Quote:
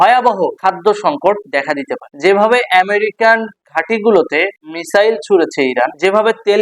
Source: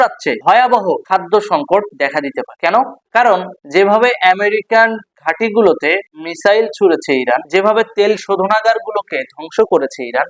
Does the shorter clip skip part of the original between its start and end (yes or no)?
yes